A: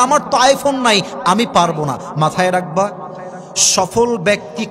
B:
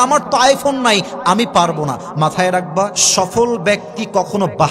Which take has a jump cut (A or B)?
B